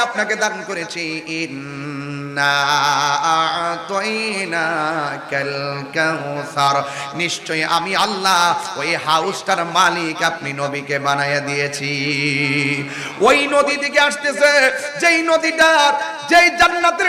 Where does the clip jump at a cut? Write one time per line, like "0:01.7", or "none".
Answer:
none